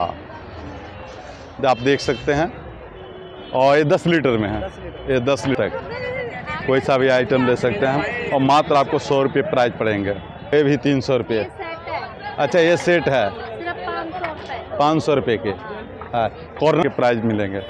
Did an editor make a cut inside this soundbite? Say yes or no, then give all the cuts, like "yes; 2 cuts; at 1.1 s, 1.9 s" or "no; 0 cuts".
yes; 3 cuts; at 5.6 s, 10.5 s, 16.8 s